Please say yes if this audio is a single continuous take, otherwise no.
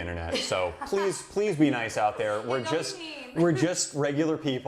yes